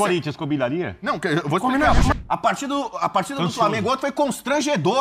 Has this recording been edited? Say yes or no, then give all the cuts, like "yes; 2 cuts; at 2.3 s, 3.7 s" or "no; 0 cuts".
yes; 1 cut; at 2.1 s